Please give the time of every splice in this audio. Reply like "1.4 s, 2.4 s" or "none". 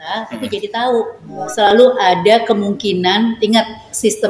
1.4 s